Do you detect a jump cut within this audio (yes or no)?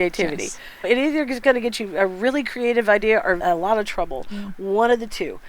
yes